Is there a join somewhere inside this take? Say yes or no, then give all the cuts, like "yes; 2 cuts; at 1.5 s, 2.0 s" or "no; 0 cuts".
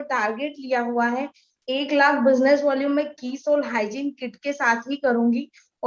no; 0 cuts